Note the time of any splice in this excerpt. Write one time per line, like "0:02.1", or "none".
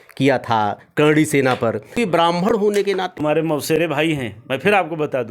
0:01.9
0:03.2